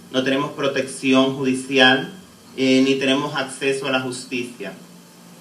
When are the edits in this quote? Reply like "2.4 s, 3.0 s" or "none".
1.2 s

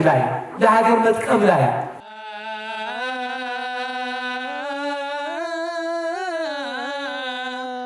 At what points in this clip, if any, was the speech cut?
2.0 s

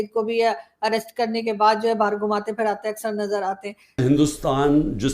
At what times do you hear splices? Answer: 4.0 s

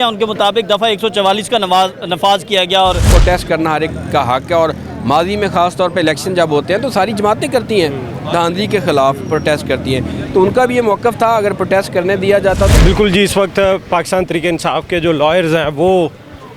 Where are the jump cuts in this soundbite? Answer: 3.1 s, 12.7 s

